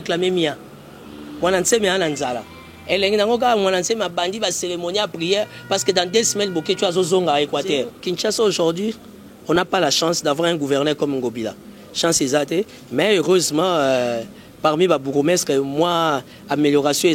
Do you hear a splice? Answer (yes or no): no